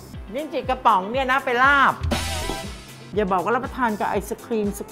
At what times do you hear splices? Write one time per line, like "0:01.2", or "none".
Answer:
0:03.0

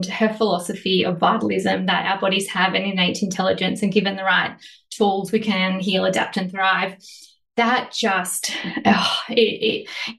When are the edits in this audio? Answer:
none

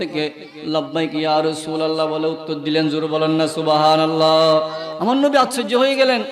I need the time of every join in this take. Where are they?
0:04.8

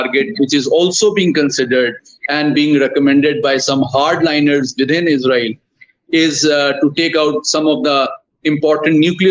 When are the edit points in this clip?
none

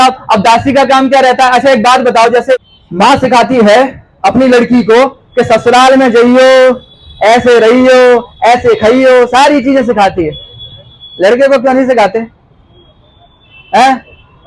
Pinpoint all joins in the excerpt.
0:02.6

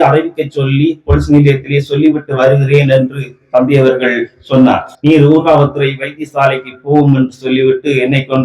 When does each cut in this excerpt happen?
0:04.9

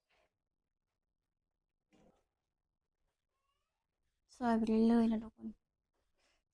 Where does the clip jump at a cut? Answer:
0:02.1

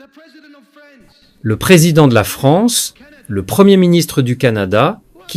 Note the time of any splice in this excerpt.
0:01.7

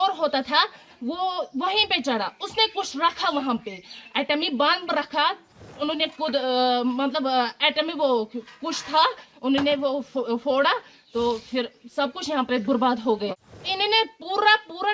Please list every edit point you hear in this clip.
0:05.7
0:13.3

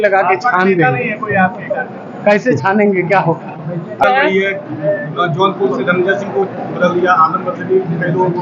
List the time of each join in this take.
0:04.0

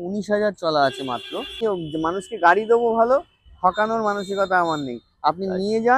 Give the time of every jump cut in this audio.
0:01.6

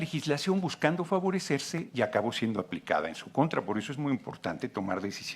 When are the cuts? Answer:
0:01.8

